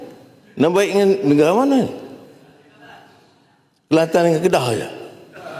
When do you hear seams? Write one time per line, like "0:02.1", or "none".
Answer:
none